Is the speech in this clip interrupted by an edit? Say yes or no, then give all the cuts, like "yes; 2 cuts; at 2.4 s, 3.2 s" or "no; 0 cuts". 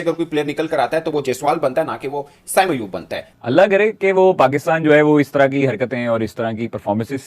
yes; 1 cut; at 3.2 s